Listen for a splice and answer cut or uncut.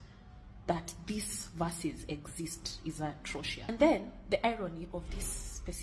cut